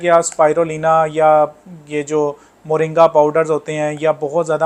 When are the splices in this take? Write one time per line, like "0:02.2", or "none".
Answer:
none

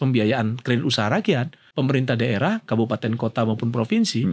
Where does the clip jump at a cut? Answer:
0:01.6

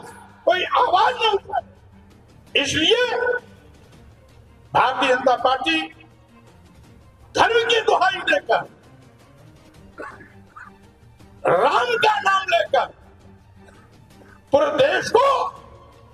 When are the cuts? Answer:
0:13.0
0:14.5

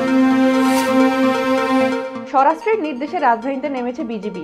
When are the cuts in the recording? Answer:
0:02.1

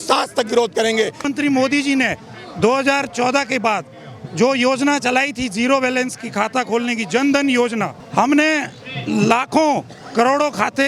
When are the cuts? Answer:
0:01.2
0:08.0

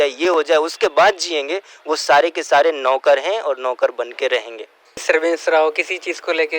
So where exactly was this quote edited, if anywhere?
0:05.0

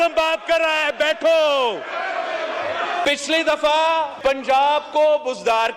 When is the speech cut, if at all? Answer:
0:03.1
0:04.1

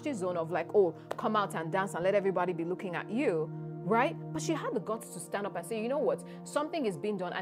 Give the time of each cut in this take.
none

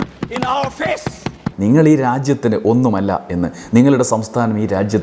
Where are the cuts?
0:01.4

